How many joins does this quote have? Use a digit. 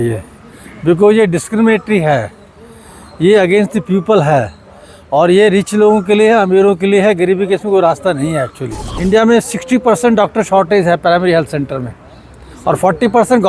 1